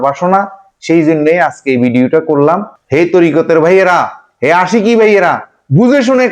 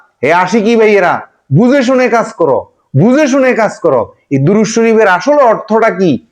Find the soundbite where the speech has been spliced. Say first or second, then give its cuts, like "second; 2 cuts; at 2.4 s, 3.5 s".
first; 1 cut; at 2.7 s